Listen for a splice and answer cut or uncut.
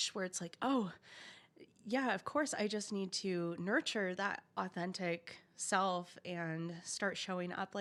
uncut